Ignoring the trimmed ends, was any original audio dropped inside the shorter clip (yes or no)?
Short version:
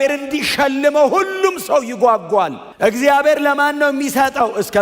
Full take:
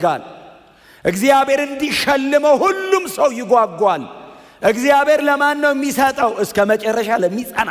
yes